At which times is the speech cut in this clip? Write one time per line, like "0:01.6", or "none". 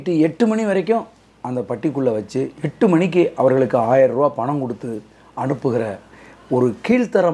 none